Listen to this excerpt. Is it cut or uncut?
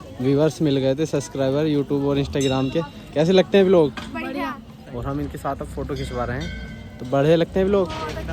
uncut